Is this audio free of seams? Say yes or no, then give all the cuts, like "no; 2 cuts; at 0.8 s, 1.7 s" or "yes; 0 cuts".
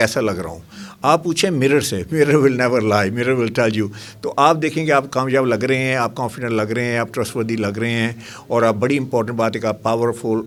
yes; 0 cuts